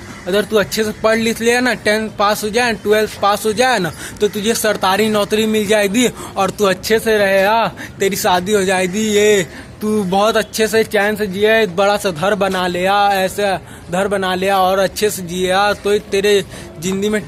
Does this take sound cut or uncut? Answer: uncut